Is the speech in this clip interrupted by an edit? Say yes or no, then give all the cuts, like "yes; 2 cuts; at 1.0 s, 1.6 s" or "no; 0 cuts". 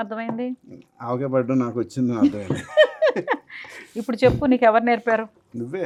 no; 0 cuts